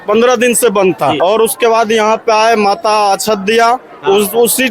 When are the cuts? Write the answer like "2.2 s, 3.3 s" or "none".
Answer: 1.2 s